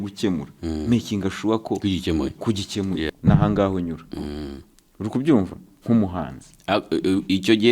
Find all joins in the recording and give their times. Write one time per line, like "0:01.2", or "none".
0:03.1

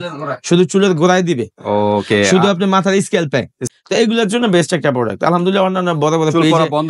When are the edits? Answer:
0:03.7

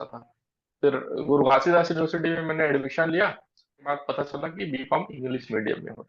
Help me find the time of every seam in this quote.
0:03.8

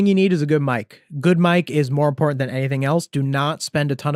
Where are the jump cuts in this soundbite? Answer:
none

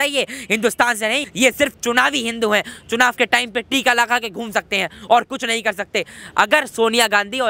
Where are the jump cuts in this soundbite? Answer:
0:01.3

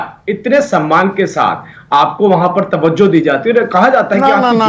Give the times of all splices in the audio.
none

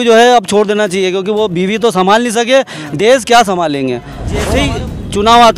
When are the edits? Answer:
0:04.5

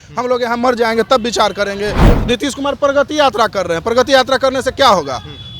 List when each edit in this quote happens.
0:02.0

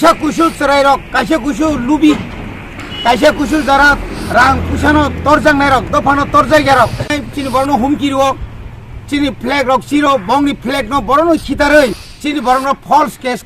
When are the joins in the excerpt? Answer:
0:07.2
0:12.1

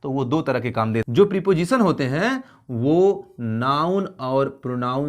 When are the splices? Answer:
0:01.0

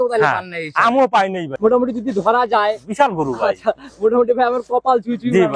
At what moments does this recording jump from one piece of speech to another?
0:01.5

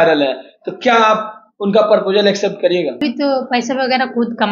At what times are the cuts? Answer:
0:03.0

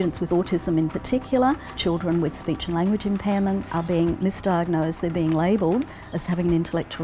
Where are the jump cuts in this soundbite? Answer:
0:03.8

